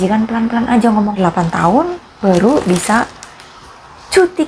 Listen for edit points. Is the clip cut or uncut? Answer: cut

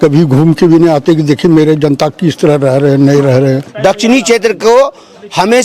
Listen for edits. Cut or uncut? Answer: cut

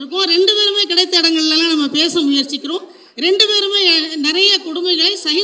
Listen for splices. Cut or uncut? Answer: uncut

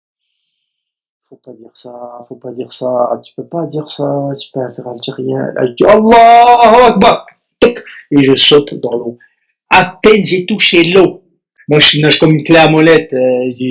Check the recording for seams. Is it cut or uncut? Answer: cut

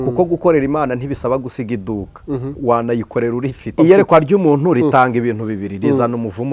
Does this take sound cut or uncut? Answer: cut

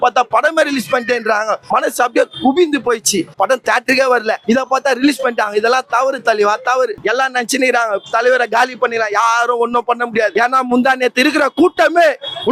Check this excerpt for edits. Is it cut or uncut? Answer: cut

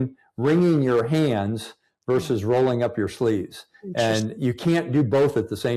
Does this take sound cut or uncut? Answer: uncut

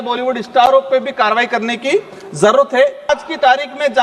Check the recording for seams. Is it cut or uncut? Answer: cut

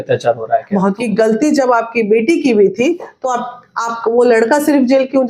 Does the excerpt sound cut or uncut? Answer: cut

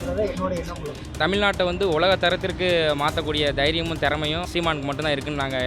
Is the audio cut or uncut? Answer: cut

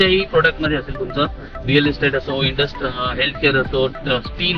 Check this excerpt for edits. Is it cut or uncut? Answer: uncut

